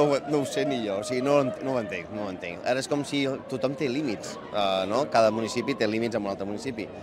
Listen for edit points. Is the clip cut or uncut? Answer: uncut